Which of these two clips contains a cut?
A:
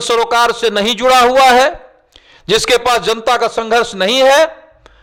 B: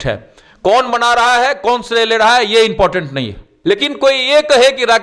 B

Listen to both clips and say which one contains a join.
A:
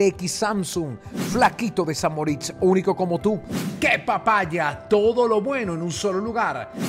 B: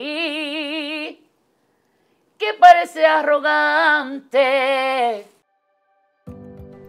B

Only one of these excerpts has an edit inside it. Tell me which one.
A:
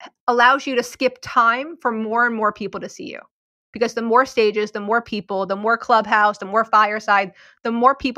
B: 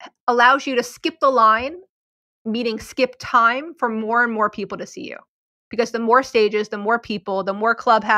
A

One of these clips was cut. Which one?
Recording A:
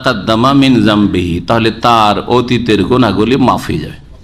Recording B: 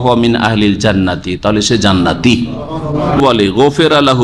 B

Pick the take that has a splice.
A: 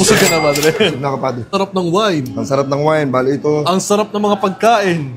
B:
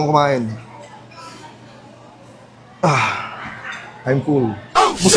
A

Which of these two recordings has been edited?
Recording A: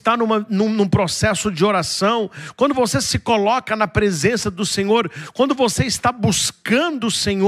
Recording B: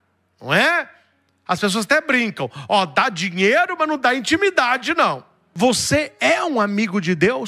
B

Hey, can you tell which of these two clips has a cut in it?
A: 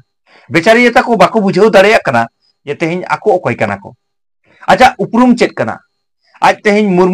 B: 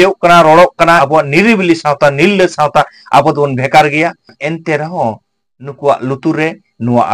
B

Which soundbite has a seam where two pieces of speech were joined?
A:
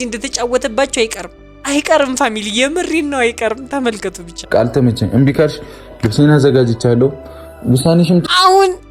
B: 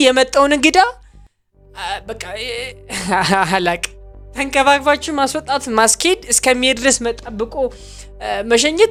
A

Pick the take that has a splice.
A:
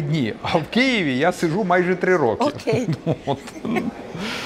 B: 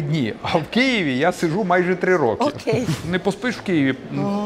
B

